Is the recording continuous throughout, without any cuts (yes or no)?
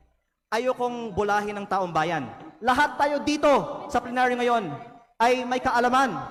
yes